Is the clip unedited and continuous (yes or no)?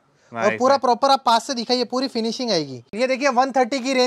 no